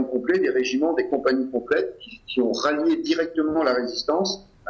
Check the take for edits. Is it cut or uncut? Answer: uncut